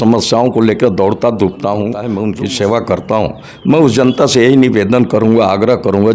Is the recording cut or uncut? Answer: cut